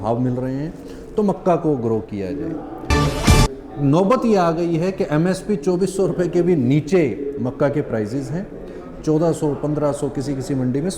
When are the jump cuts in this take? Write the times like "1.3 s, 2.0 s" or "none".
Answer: 3.1 s